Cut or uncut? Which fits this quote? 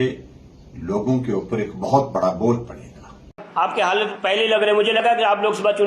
cut